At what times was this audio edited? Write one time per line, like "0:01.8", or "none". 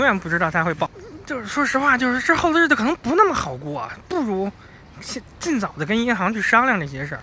0:01.1